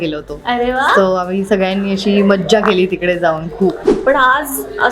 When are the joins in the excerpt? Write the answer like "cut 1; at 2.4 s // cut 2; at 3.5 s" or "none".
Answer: cut 1; at 3.9 s